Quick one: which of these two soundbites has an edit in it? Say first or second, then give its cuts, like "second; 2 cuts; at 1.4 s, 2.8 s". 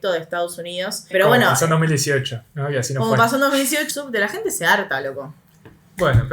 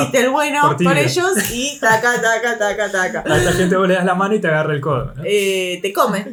first; 2 cuts; at 1.1 s, 3.9 s